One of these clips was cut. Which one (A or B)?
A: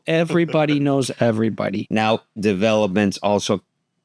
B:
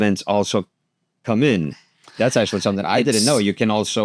A